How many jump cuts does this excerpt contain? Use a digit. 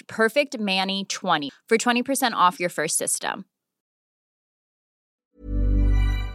1